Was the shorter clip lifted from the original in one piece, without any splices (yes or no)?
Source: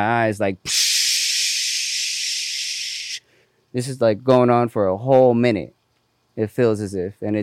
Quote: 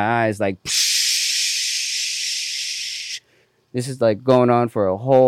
yes